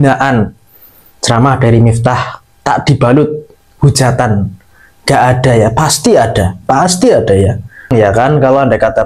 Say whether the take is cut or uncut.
cut